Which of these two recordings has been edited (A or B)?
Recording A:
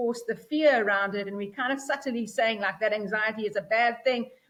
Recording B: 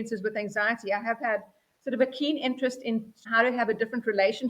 B